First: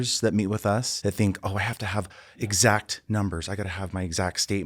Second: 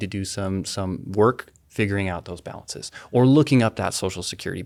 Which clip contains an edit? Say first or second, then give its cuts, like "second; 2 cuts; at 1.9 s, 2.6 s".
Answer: first; 1 cut; at 0.9 s